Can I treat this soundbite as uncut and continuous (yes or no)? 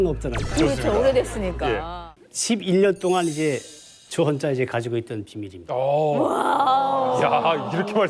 no